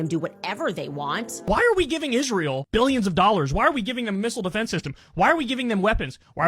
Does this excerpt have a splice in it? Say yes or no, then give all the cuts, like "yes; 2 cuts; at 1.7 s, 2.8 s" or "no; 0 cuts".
yes; 1 cut; at 1.4 s